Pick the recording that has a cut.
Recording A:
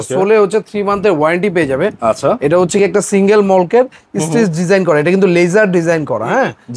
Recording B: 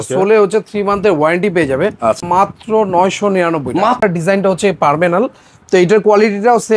B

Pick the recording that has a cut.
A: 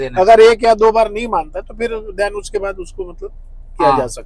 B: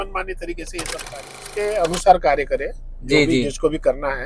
B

